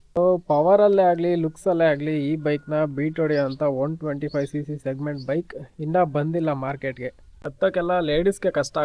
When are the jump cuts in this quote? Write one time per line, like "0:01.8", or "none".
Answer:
0:07.2